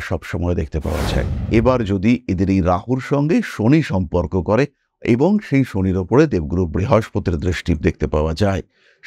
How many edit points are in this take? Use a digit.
1